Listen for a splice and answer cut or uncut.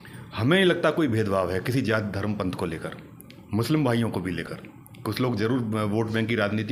uncut